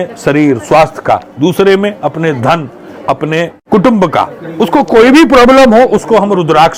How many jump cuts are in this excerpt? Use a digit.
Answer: 0